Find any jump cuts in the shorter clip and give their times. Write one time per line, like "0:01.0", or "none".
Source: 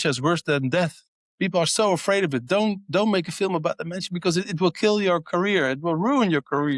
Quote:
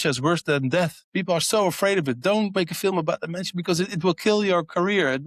0:01.0
0:02.6